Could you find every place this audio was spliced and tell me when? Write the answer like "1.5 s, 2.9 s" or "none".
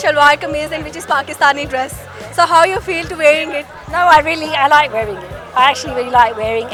none

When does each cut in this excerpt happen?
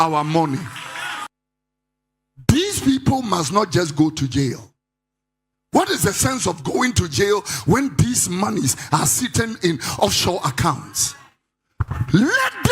1.3 s

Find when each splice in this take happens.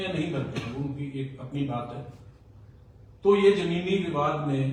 none

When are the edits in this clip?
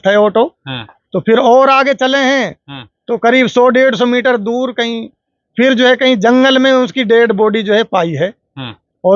none

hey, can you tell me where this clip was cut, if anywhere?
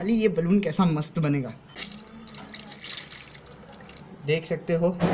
1.8 s, 4.0 s

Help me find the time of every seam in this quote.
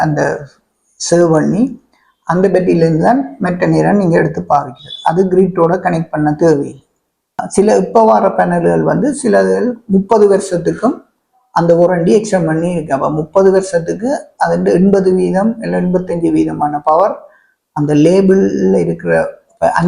7.5 s

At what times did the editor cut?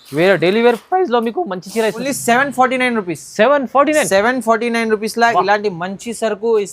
2.0 s

